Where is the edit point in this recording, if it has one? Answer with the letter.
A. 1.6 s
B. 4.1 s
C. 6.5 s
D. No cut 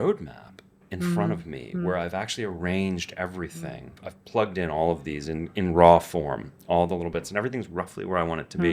B